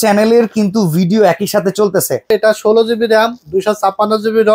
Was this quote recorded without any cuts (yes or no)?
no